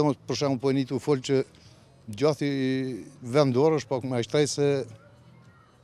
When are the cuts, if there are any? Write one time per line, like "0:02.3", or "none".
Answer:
none